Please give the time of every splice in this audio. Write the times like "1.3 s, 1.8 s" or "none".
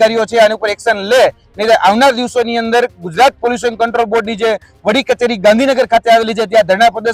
none